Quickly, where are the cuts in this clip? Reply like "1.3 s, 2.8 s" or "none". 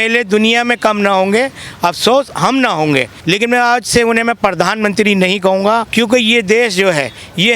3.1 s, 5.9 s